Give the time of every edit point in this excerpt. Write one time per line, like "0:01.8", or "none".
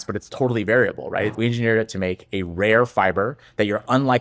0:01.3

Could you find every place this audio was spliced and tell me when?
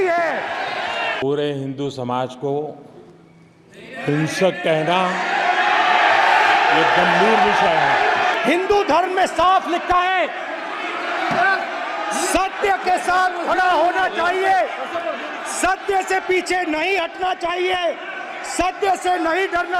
0:01.2
0:08.3

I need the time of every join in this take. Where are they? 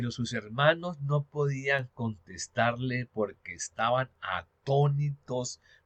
none

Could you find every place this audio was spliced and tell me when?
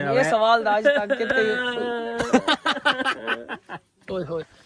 none

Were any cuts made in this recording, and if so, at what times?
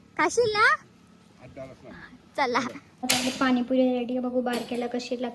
0:02.9

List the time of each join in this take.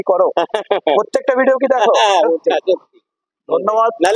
0:02.5

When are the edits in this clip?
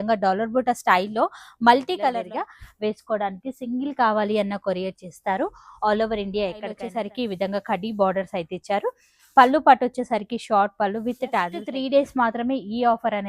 0:02.2
0:06.8
0:11.6

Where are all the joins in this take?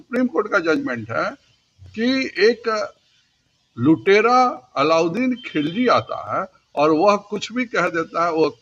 none

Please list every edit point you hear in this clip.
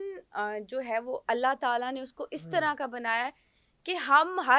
none

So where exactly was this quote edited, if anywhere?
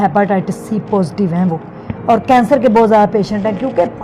none

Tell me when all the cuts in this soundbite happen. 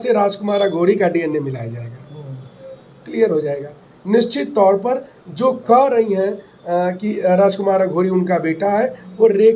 none

